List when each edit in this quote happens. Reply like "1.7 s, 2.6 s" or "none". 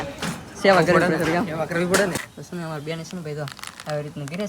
2.2 s